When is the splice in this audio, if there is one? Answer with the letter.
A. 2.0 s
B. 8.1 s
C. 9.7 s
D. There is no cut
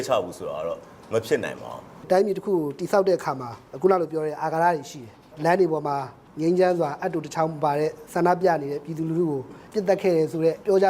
A